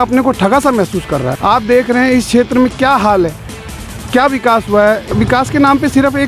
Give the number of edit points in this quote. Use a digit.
2